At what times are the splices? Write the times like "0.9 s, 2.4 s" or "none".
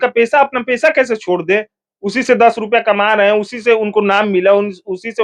none